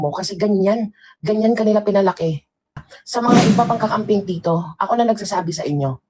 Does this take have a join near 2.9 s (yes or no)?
yes